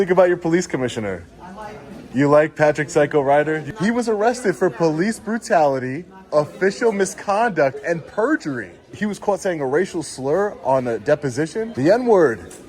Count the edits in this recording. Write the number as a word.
three